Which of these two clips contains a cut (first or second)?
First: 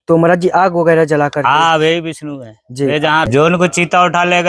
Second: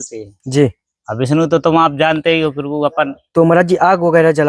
first